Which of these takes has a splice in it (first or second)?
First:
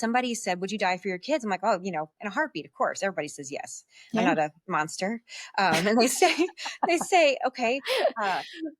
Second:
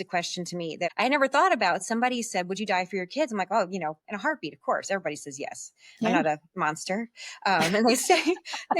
second